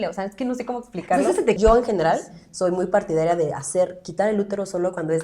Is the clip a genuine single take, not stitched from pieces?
no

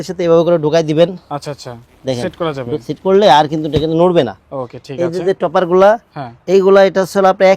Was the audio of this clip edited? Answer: no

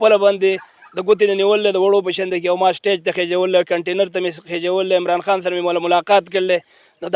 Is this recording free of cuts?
yes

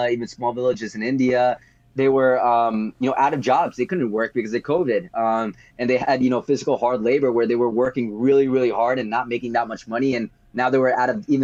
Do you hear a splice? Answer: no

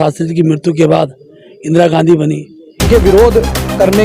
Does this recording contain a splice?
yes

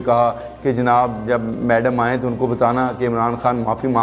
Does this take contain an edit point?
no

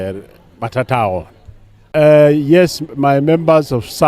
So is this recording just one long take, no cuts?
no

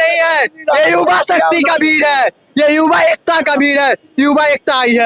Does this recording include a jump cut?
no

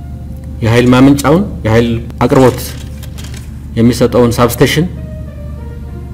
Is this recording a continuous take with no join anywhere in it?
no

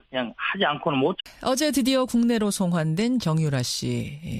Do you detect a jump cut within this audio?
no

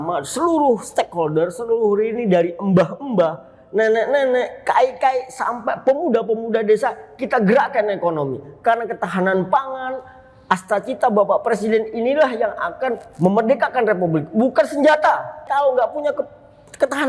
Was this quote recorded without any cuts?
no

